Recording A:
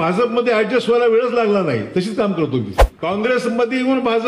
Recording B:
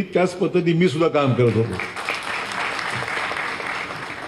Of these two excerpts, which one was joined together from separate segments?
A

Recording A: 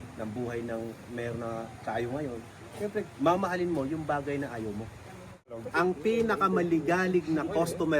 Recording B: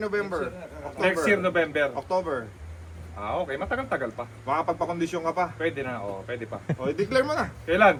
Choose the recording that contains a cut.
A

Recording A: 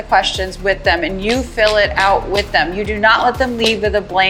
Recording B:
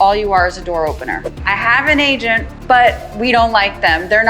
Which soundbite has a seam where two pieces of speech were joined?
B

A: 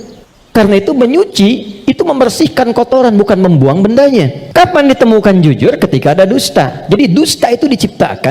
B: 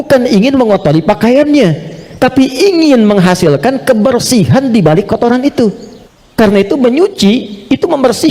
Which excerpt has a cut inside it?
A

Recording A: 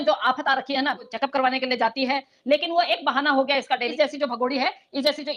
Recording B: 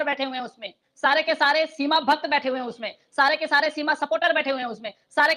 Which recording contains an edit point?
A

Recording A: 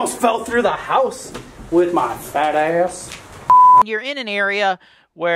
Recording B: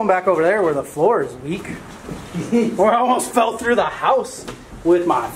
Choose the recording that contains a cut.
A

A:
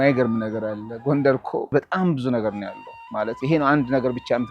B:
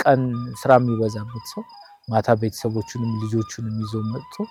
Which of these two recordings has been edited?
A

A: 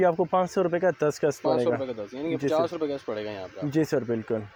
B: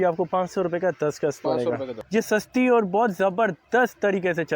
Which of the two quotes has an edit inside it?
B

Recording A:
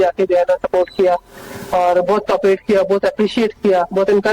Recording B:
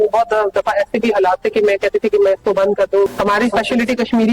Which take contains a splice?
B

